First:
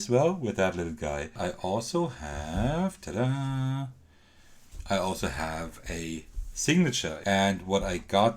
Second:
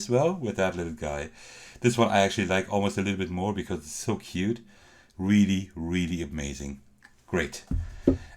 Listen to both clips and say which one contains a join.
first; 2 cuts; at 1.4 s, 7.1 s

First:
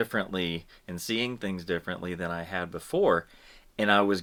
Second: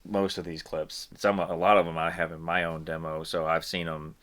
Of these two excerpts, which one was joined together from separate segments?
second; 1 cut; at 1.0 s

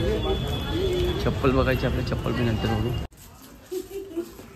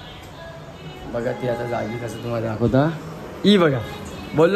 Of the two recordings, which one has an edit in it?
first; 1 cut; at 3.0 s

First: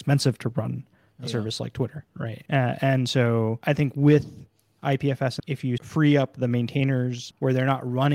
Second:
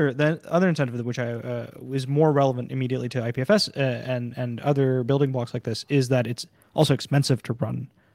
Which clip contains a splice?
first; 4 cuts; at 2.3 s, 3.6 s, 5.6 s, 7.2 s

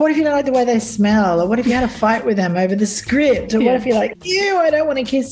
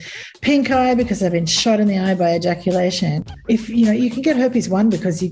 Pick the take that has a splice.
second; 1 cut; at 3.2 s

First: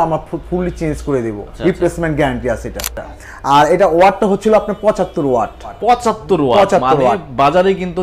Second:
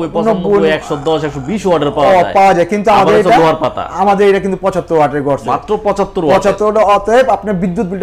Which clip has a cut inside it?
first; 3 cuts; at 1.5 s, 3.2 s, 5.8 s

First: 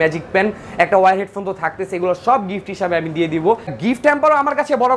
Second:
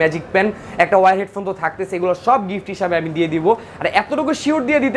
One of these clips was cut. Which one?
first; 1 cut; at 3.8 s

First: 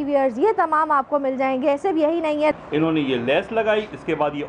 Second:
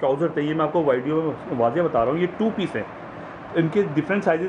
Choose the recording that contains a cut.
first; 1 cut; at 2.5 s

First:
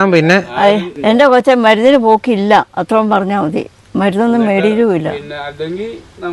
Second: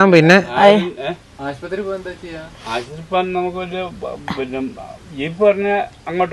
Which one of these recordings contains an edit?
first; 1 cut; at 1.0 s

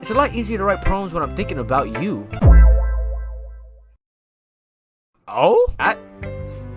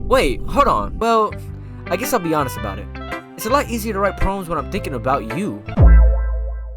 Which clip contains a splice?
second; 1 cut; at 0.9 s

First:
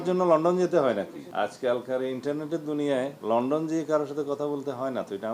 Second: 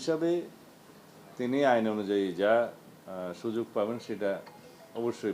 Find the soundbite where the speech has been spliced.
first; 2 cuts; at 1.2 s, 3.2 s

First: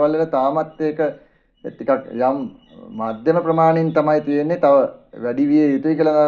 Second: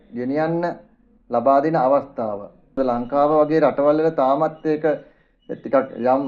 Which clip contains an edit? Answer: second; 1 cut; at 2.8 s

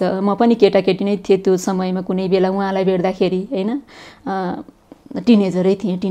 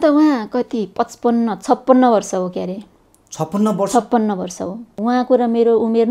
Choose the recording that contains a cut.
second; 1 cut; at 5.0 s

